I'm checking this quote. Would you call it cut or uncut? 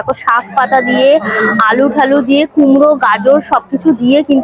uncut